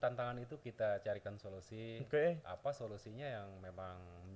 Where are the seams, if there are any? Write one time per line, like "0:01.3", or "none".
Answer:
none